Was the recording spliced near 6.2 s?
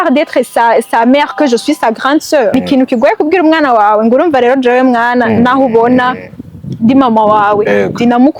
no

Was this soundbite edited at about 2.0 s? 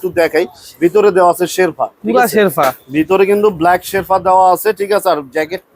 no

